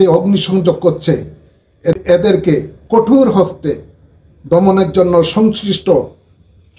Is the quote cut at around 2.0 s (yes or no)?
yes